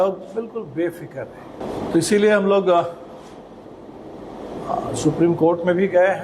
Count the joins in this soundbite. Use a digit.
1